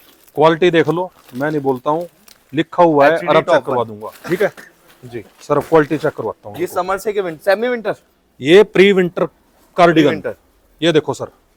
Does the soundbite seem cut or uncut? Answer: uncut